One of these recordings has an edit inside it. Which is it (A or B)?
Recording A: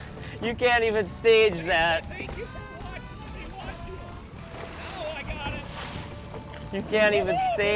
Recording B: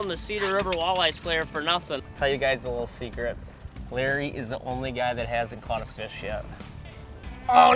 B